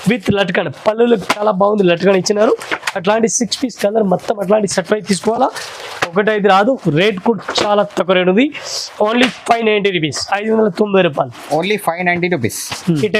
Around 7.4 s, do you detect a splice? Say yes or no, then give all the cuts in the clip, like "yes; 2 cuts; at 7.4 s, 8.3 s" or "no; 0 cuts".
no; 0 cuts